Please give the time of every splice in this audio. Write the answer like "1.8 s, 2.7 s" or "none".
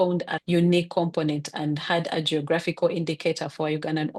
none